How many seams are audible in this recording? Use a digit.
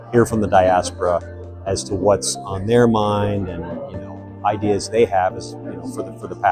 0